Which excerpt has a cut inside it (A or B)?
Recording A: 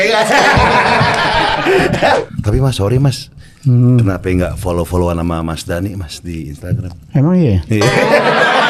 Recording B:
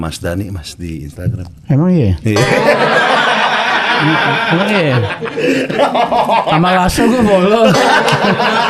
A